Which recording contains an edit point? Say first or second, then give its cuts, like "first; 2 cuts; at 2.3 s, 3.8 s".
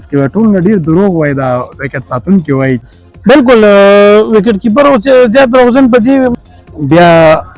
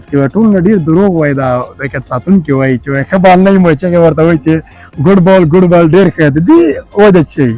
first; 2 cuts; at 2.9 s, 6.3 s